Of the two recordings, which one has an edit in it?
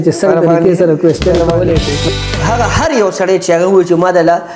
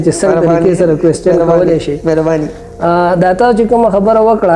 first; 1 cut; at 2.1 s

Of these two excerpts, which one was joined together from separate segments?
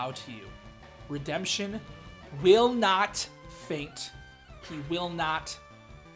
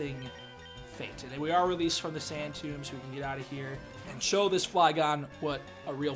second; 1 cut; at 4.0 s

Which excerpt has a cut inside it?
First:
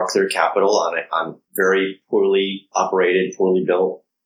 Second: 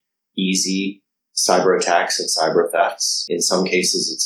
first; 2 cuts; at 1.4 s, 2.7 s

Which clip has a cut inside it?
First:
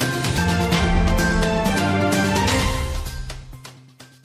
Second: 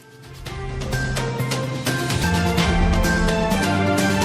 second; 1 cut; at 0.9 s

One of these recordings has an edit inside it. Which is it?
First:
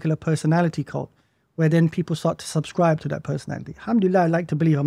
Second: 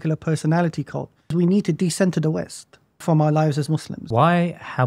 second; 3 cuts; at 1.3 s, 3.0 s, 4.1 s

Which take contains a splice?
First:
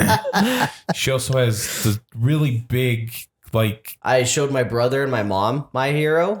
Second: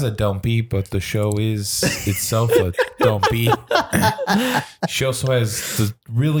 first; 1 cut; at 3.9 s

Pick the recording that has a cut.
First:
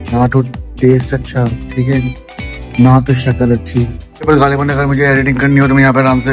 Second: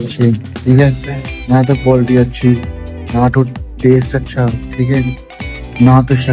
first; 1 cut; at 4.3 s

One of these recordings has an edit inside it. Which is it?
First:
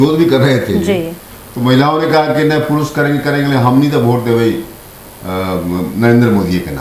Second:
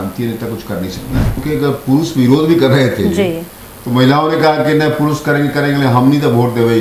second; 1 cut; at 1.4 s

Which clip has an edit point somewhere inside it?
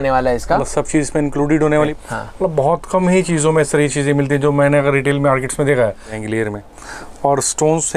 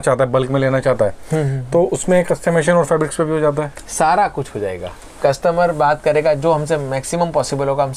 first; 2 cuts; at 1.9 s, 6.1 s

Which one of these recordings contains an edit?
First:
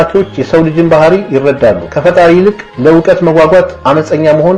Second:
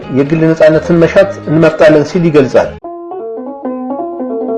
second; 1 cut; at 2.8 s

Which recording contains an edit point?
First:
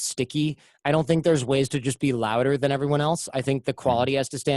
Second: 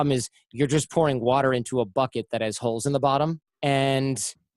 second; 1 cut; at 3.5 s

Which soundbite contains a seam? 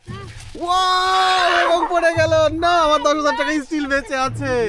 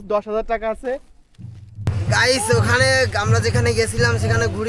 second; 1 cut; at 1.9 s

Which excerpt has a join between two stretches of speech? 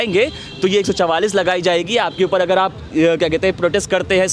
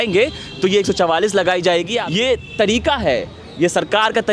second; 1 cut; at 2.0 s

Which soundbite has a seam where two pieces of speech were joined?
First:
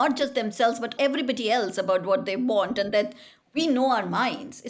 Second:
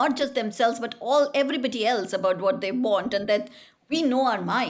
first; 1 cut; at 1.0 s

